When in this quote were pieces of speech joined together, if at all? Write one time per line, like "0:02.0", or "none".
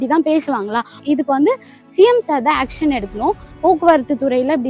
0:01.0
0:03.5